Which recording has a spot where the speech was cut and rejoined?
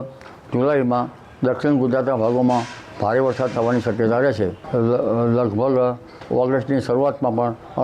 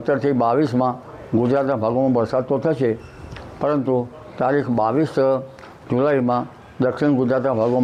first; 1 cut; at 4.6 s

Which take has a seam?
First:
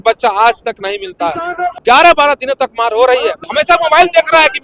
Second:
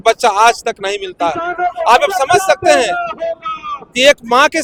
first; 2 cuts; at 1.8 s, 3.4 s

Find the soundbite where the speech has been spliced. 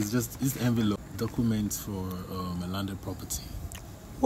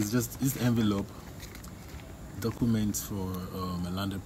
first; 1 cut; at 1.0 s

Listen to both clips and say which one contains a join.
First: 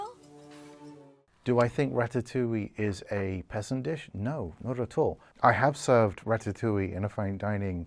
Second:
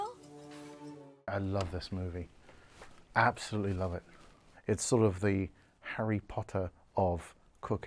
first; 2 cuts; at 1.1 s, 5.3 s

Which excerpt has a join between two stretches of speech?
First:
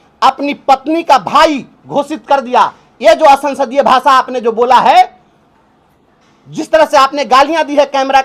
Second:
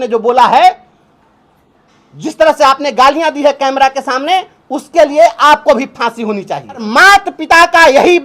second; 1 cut; at 6.9 s

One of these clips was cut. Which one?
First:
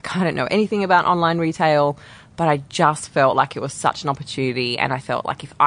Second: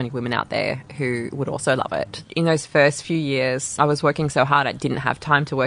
second; 2 cuts; at 2.3 s, 3.6 s

